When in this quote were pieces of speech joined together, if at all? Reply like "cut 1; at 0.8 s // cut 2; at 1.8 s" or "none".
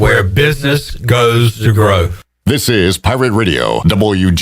cut 1; at 2.2 s